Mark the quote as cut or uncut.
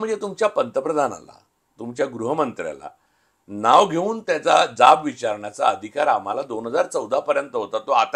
uncut